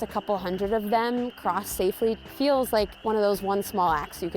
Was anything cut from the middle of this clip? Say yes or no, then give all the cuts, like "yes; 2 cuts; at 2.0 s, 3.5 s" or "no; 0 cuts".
yes; 2 cuts; at 2.2 s, 2.9 s